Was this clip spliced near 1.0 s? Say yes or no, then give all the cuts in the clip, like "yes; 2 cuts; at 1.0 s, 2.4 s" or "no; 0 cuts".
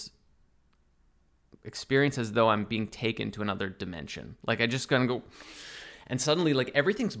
no; 0 cuts